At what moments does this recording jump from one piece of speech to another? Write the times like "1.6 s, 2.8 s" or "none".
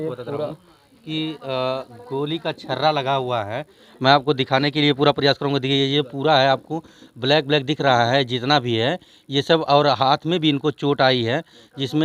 none